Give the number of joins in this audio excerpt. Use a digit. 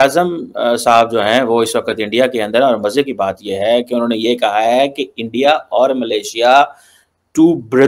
0